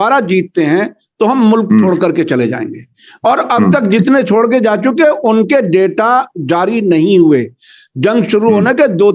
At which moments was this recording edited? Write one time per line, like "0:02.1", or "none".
none